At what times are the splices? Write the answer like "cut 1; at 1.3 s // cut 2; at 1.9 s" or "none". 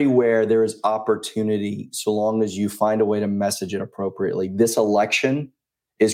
none